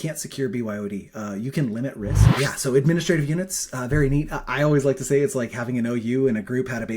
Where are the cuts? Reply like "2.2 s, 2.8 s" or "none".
2.2 s